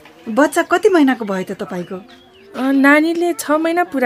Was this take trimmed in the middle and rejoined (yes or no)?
no